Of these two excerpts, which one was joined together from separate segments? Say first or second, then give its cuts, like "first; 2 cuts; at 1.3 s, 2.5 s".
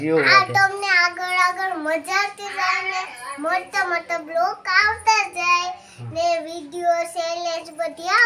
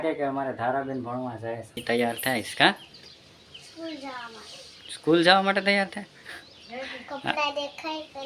second; 1 cut; at 1.8 s